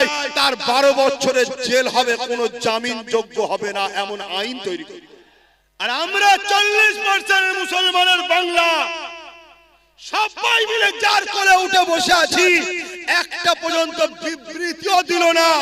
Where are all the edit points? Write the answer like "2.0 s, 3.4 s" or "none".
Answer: 5.9 s